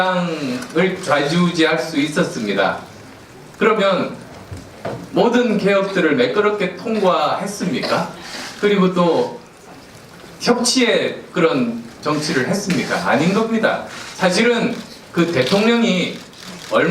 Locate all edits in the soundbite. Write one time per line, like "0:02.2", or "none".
0:10.4